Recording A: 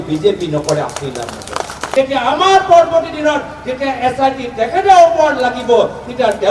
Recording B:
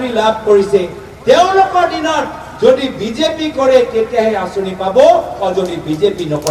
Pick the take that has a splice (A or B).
A